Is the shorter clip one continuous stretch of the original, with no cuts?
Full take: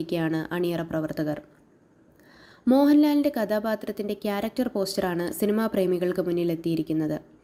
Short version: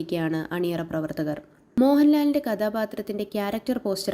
no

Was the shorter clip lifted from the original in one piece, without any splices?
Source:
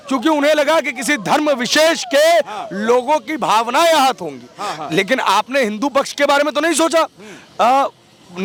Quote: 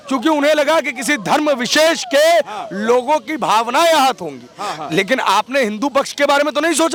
yes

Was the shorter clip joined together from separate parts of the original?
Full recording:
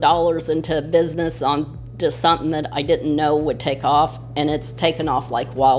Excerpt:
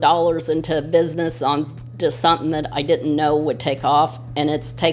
no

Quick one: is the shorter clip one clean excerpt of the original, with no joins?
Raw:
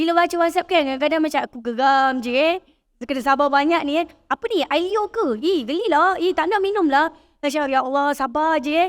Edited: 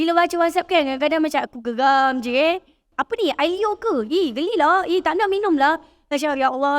no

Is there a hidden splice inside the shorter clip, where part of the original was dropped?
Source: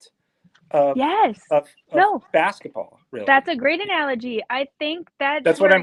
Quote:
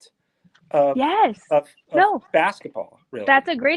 no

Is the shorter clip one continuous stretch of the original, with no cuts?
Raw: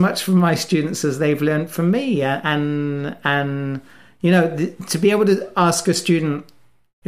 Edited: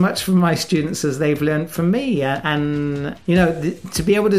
no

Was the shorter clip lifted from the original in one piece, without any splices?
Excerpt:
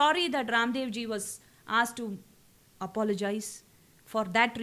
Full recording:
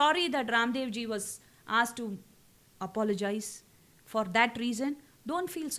yes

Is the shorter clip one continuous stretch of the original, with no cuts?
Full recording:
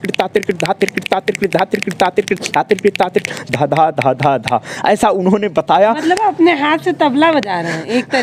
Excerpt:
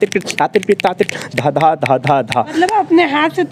no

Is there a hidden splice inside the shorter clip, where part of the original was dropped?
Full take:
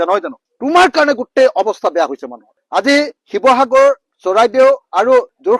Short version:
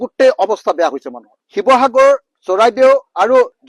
yes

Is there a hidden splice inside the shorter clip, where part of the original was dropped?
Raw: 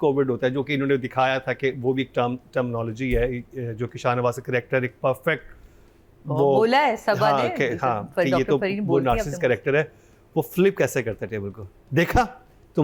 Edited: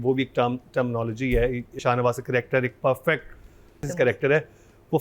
yes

